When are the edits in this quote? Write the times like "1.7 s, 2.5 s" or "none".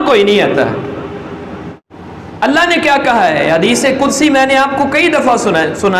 1.8 s